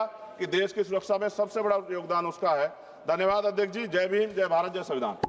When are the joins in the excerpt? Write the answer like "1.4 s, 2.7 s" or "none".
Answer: none